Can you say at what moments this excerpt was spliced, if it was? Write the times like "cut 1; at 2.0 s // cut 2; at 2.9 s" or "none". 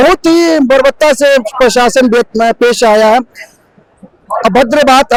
none